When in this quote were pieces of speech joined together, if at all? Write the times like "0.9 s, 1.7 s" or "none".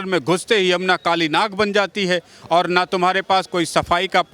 none